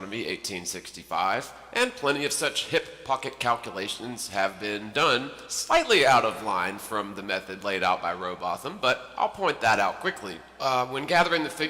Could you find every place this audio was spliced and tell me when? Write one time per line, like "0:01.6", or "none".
0:10.8